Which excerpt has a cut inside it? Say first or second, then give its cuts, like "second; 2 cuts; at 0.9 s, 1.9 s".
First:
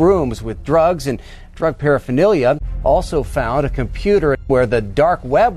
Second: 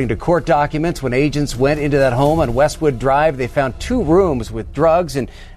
first; 2 cuts; at 2.7 s, 4.4 s